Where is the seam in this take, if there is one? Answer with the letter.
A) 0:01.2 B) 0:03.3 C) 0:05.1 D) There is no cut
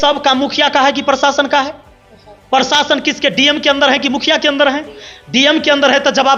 D